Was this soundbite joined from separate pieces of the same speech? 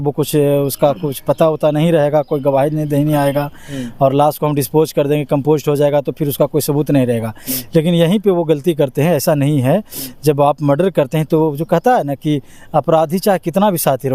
no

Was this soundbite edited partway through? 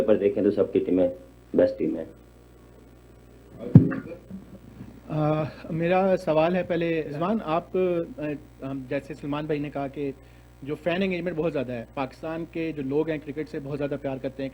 no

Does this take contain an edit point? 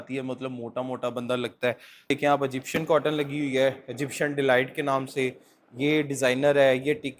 yes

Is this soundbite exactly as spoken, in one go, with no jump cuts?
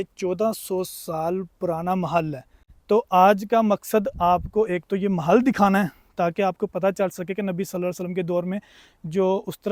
yes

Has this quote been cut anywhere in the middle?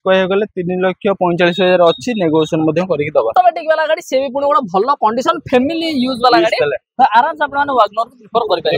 yes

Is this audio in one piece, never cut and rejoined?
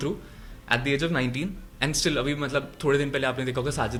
yes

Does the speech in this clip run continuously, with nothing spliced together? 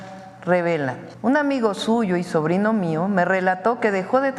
no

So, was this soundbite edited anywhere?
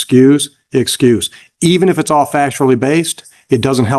no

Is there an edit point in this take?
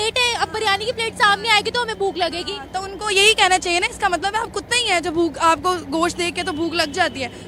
no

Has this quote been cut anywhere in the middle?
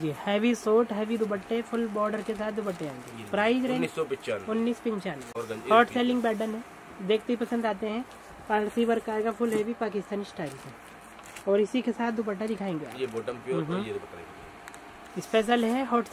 no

